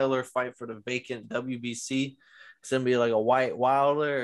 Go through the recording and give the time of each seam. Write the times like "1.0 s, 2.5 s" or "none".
none